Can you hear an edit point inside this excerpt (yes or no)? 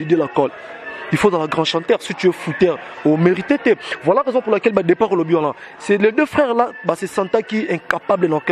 no